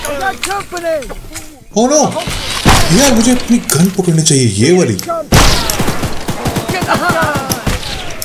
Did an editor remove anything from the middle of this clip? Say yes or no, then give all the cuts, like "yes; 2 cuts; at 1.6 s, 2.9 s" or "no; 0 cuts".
no; 0 cuts